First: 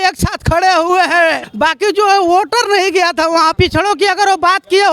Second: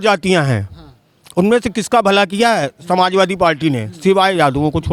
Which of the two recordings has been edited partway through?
first; 2 cuts; at 1.4 s, 3.5 s

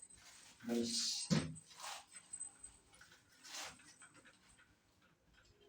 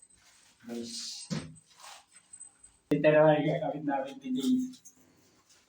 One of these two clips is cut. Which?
second; 1 cut; at 2.9 s

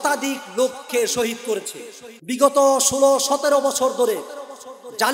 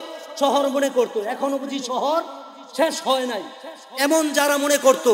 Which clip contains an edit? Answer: first; 1 cut; at 2.1 s

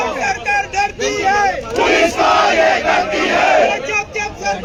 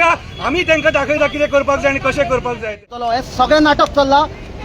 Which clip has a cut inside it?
second; 1 cut; at 3.0 s

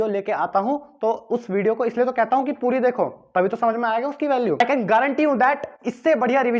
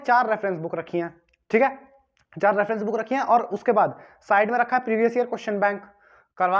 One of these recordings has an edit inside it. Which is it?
first; 1 cut; at 4.6 s

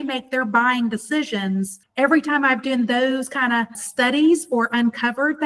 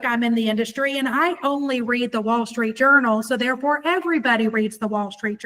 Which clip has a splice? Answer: first; 2 cuts; at 1.7 s, 3.8 s

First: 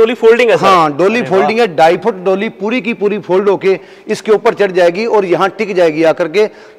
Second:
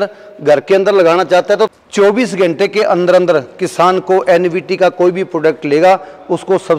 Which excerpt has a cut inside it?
second; 1 cut; at 1.7 s

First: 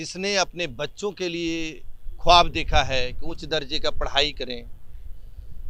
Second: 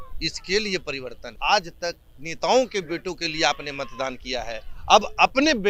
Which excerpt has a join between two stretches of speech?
second; 1 cut; at 1.3 s

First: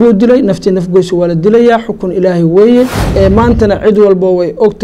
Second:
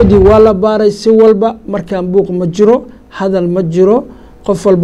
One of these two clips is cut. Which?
first; 1 cut; at 3.0 s

